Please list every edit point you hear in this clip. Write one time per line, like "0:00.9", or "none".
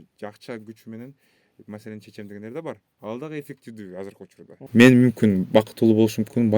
0:04.5